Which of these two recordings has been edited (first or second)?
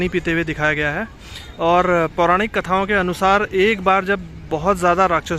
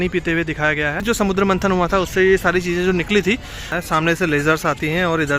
second